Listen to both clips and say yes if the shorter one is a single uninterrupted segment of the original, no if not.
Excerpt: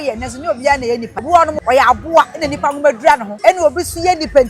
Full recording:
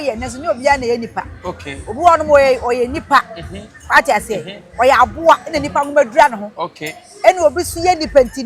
no